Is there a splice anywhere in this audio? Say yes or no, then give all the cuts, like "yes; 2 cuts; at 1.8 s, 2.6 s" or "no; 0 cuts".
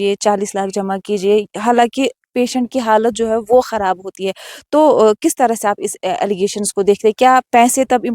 no; 0 cuts